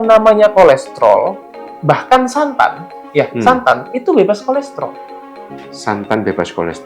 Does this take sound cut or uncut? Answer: uncut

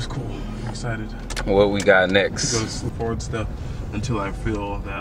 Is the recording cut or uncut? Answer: cut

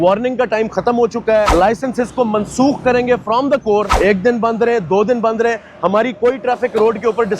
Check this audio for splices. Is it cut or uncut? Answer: cut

